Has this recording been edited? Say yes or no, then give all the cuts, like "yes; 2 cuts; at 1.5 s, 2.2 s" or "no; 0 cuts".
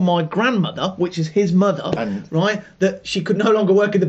no; 0 cuts